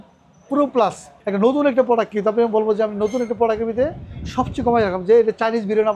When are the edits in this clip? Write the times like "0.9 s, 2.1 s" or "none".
1.1 s